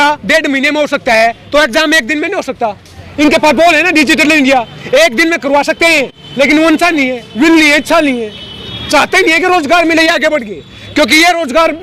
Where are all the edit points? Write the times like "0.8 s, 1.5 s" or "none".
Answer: none